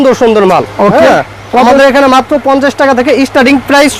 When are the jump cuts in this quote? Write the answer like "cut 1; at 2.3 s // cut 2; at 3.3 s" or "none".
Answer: none